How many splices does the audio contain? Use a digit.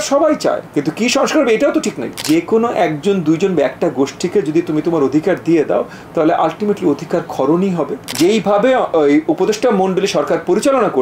2